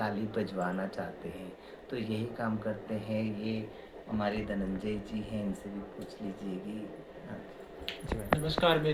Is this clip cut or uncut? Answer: uncut